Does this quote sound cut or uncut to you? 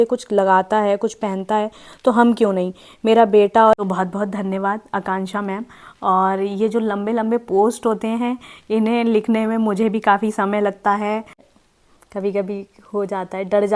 cut